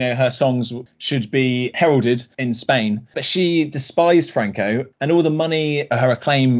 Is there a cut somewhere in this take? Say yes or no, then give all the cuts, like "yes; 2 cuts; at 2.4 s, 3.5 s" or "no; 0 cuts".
yes; 2 cuts; at 2.3 s, 4.9 s